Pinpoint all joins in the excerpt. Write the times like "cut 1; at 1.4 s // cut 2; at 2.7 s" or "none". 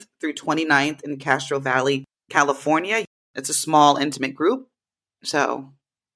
cut 1; at 3.1 s